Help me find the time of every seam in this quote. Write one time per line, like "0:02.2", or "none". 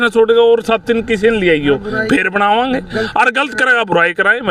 none